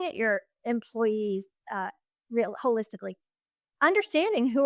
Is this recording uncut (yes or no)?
yes